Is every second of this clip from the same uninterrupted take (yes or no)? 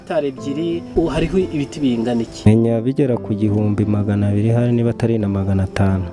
no